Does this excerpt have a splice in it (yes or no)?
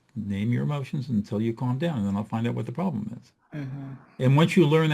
yes